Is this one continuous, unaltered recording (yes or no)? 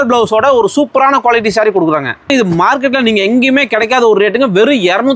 no